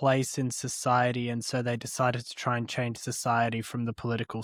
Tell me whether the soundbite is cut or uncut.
uncut